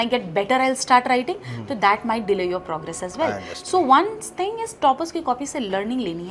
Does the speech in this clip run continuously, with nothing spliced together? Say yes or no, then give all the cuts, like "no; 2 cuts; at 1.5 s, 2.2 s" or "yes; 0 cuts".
yes; 0 cuts